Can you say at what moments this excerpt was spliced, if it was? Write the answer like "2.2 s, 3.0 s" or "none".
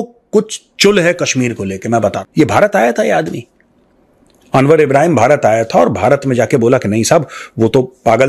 2.2 s